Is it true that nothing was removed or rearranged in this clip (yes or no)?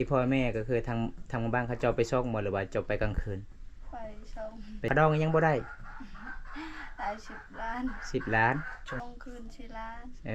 no